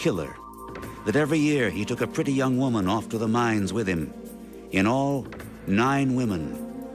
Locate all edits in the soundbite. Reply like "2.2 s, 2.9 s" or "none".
1.7 s